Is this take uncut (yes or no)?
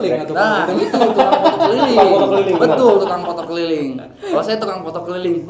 yes